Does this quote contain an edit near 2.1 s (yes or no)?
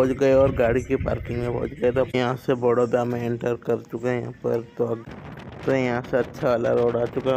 yes